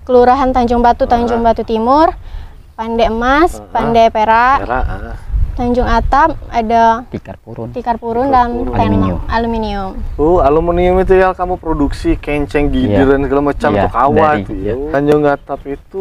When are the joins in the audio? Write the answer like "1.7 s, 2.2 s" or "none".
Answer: 14.8 s

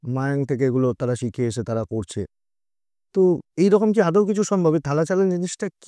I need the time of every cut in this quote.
none

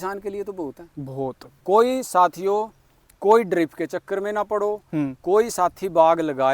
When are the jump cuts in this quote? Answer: 1.5 s

